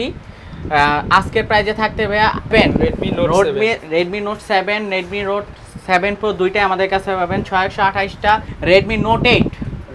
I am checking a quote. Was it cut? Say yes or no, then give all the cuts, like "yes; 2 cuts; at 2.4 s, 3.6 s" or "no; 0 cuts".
yes; 2 cuts; at 2.5 s, 8.5 s